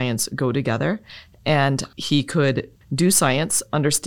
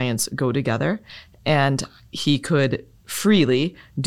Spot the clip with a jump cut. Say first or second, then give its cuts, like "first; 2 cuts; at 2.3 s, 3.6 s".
first; 2 cuts; at 1.9 s, 2.8 s